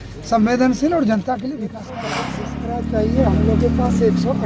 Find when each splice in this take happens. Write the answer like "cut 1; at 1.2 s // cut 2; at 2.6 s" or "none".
cut 1; at 2.2 s